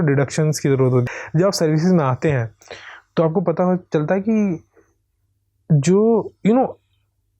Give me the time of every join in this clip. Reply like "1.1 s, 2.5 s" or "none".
1.1 s

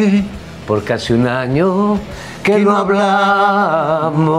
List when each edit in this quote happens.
none

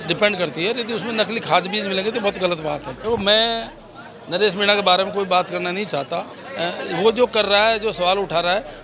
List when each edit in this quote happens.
2.9 s

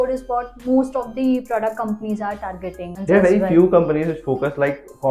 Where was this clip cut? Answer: 2.9 s

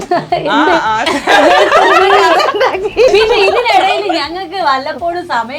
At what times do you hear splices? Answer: 3.1 s

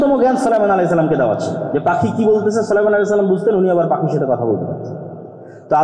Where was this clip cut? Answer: none

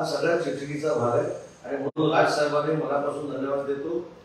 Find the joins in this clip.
none

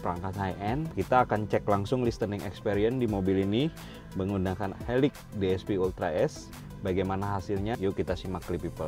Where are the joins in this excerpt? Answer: 0.9 s, 7.8 s

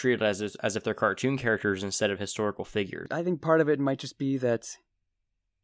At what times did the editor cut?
3.1 s

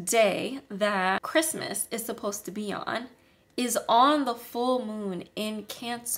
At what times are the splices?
1.3 s

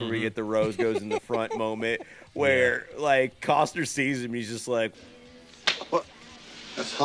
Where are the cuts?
none

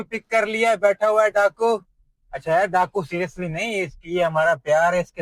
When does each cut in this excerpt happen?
none

